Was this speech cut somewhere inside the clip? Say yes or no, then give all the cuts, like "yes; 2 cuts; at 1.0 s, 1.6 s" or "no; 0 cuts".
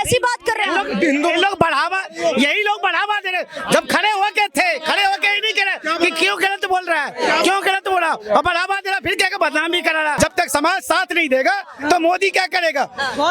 yes; 1 cut; at 10.2 s